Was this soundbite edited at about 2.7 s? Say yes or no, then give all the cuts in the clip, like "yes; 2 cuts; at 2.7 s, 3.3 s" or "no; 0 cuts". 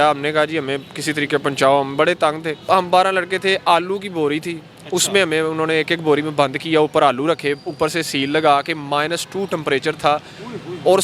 yes; 1 cut; at 2.7 s